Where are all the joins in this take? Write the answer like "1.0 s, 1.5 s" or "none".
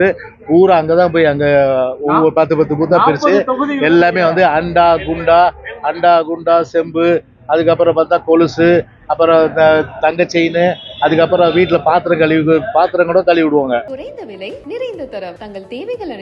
14.0 s